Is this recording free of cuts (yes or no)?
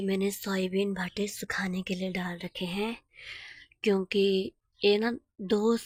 yes